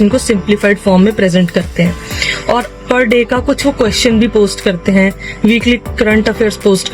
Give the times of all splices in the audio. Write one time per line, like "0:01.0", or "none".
none